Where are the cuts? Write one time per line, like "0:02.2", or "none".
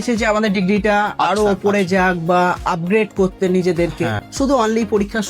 0:04.2